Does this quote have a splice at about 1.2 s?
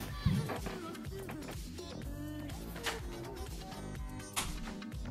yes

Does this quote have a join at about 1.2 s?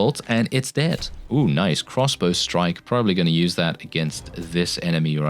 yes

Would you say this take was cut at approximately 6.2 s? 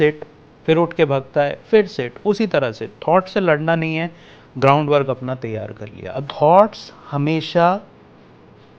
yes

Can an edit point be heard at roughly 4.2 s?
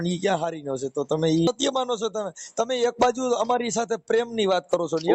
no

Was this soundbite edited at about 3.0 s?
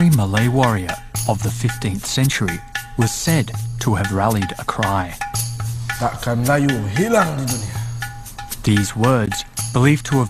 no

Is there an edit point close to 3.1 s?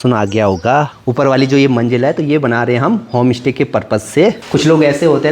no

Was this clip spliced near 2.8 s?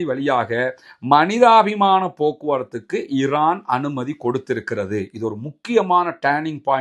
no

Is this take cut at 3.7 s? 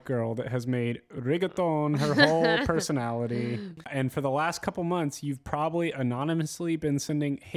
yes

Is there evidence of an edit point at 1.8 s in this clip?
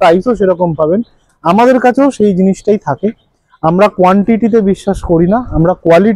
no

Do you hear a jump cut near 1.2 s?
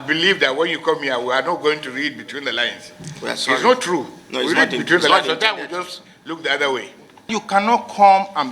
no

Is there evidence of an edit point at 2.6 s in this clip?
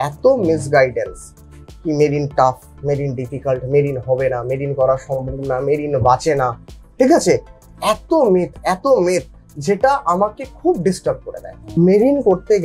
no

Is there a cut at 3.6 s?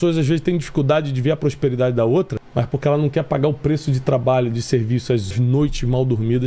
no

